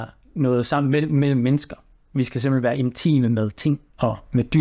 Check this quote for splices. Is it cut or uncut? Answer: uncut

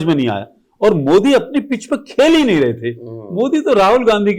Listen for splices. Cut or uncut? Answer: uncut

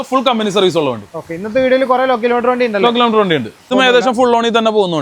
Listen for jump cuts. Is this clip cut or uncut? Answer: cut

